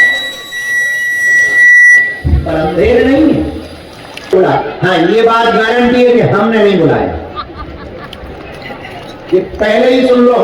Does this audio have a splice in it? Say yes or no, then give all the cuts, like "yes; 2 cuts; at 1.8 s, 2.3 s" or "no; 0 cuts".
yes; 1 cut; at 4.3 s